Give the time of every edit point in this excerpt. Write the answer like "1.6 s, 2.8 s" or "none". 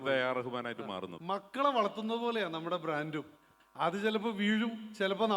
1.1 s

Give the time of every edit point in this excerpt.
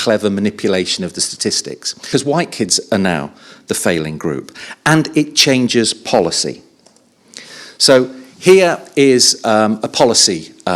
2.1 s

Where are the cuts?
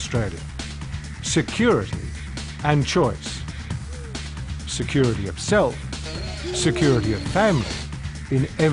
none

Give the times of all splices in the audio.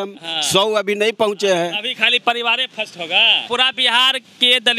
3.4 s

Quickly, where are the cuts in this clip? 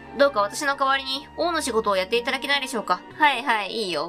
3.1 s

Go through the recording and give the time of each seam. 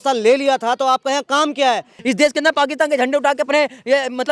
1.9 s

